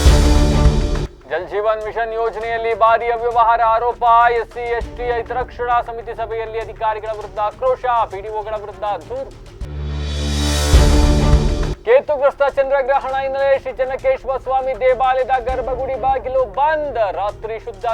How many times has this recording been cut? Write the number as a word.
zero